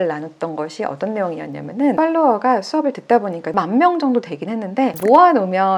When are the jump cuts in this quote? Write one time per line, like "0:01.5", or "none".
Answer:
0:02.0
0:03.5